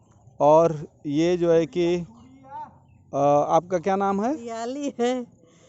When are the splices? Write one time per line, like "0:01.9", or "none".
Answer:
0:04.6